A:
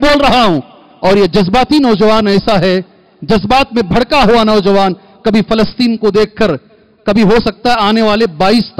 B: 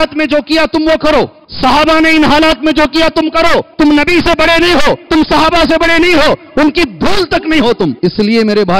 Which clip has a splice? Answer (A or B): B